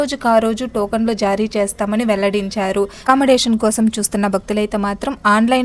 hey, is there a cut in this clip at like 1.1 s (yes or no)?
no